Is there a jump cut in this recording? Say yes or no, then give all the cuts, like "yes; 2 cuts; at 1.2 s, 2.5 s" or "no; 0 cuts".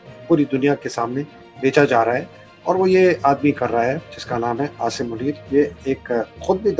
no; 0 cuts